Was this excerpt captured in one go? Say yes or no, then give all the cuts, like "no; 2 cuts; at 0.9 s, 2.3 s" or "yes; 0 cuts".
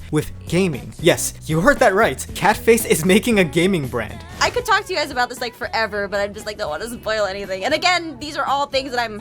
no; 3 cuts; at 1.1 s, 2.3 s, 4.3 s